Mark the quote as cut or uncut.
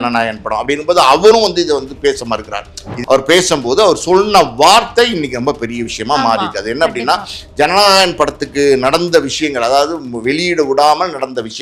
cut